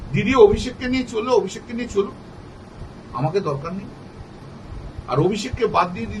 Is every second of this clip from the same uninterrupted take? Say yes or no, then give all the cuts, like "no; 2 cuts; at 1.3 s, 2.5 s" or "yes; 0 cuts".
yes; 0 cuts